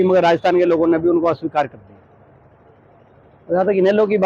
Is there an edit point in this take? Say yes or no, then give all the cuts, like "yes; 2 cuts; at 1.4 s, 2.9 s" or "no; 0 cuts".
no; 0 cuts